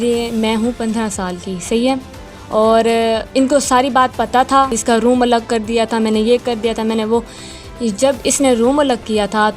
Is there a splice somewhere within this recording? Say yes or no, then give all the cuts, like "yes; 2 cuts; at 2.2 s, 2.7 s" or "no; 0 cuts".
yes; 1 cut; at 4.7 s